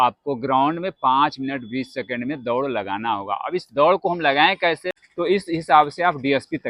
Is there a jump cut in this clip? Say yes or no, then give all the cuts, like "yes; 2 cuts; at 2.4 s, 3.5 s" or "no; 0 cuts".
yes; 1 cut; at 5.0 s